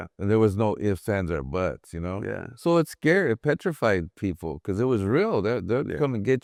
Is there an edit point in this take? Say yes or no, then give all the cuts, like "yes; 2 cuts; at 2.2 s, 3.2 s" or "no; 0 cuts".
no; 0 cuts